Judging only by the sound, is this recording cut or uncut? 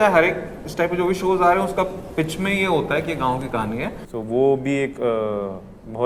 cut